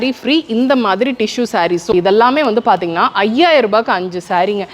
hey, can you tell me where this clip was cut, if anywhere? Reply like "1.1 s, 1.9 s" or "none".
1.9 s